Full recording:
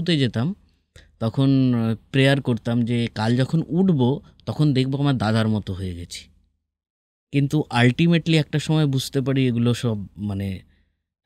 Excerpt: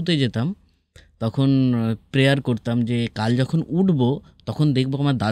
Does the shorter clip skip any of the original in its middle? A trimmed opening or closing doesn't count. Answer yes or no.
no